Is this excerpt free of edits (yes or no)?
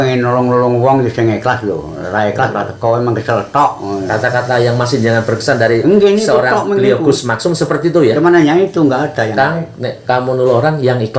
yes